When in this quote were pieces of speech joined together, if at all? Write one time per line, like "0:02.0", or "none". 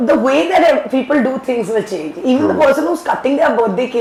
none